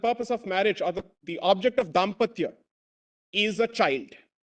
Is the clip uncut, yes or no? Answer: yes